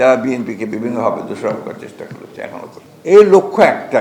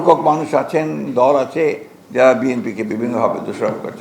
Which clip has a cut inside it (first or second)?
first